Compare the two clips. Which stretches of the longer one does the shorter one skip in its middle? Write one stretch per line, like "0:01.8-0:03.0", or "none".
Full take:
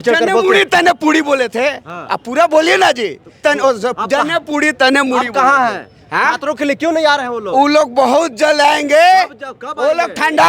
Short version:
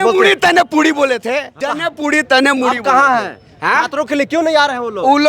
0:01.9-0:04.1